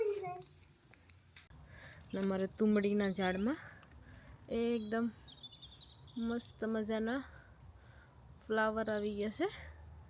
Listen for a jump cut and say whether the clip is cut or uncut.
cut